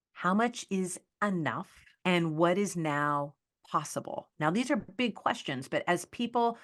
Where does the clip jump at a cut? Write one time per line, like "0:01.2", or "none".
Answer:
0:01.9